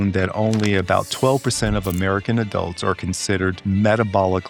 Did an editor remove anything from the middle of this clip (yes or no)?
yes